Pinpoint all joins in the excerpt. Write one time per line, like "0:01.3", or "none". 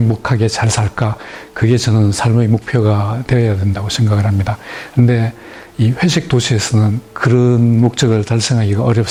none